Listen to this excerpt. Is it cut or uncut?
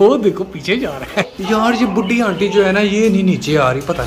cut